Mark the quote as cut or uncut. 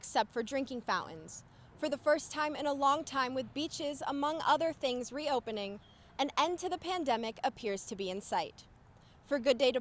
uncut